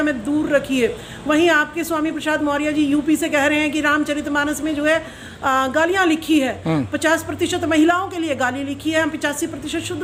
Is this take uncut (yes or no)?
yes